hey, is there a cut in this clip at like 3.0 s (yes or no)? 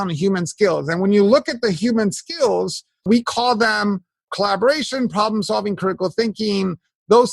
yes